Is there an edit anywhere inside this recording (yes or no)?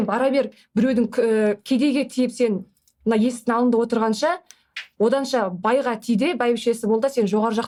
no